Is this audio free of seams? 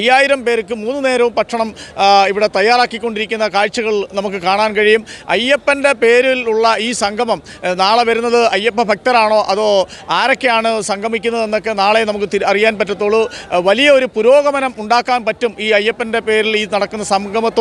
no; 1 cut; at 5.1 s

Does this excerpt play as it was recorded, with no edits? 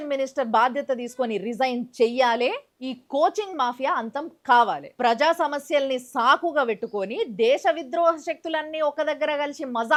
yes; 0 cuts

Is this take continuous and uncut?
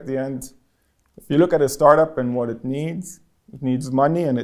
yes; 0 cuts

